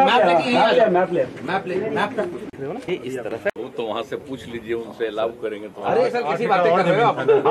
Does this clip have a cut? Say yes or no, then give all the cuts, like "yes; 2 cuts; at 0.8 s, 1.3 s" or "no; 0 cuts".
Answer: yes; 1 cut; at 2.8 s